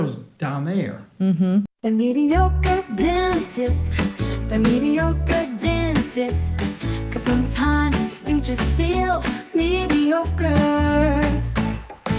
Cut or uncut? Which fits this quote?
cut